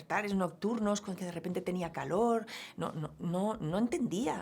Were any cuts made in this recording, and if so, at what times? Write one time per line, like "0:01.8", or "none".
none